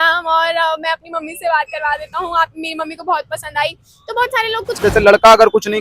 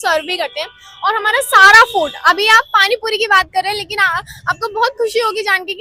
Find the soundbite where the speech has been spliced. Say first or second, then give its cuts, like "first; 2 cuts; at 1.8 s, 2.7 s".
first; 1 cut; at 4.8 s